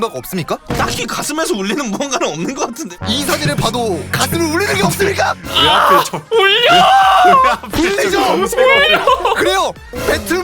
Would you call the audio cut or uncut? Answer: cut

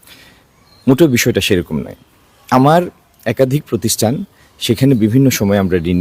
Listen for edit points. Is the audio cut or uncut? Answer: uncut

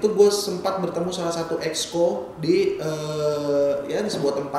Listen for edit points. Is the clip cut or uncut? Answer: uncut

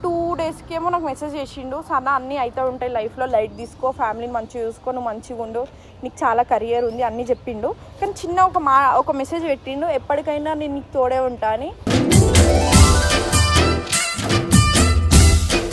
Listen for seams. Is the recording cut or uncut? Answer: uncut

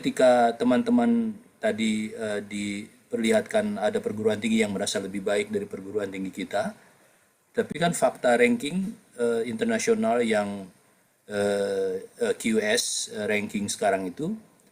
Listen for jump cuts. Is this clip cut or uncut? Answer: uncut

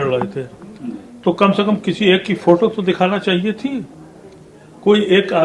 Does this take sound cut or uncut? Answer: uncut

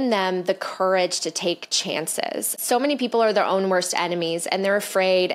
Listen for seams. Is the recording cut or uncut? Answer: cut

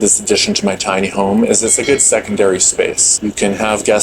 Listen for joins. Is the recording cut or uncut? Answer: cut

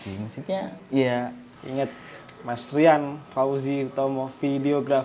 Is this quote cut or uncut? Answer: cut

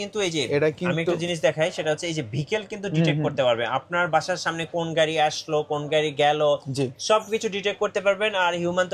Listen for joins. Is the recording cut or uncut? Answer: uncut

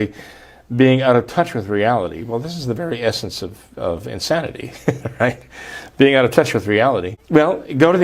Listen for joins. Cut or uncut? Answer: cut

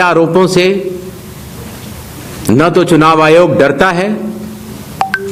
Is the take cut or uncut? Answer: uncut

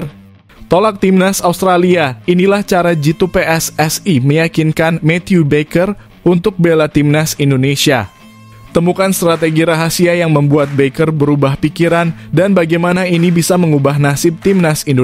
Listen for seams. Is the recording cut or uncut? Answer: uncut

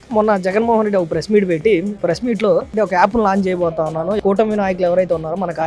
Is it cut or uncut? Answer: cut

